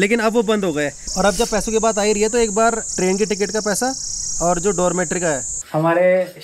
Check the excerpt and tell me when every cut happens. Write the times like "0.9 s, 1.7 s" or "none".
1.0 s, 2.9 s, 5.6 s